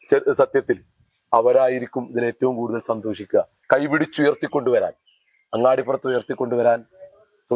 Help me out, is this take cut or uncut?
cut